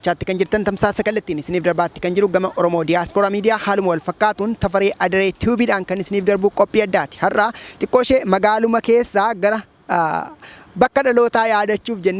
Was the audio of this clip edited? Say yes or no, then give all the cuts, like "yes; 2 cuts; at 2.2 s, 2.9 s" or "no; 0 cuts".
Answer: no; 0 cuts